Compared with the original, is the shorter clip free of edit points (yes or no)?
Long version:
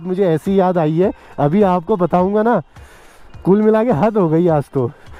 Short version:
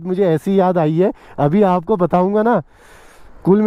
yes